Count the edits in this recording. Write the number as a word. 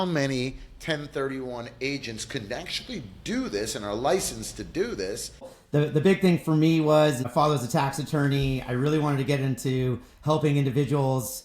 two